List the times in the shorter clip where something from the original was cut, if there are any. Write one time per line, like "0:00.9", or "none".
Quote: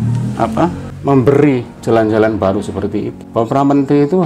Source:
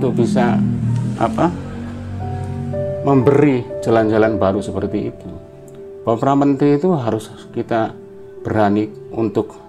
0:01.0
0:03.2